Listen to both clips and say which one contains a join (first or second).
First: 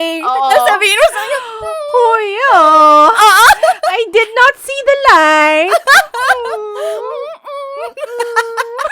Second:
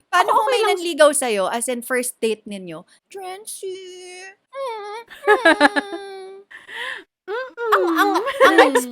second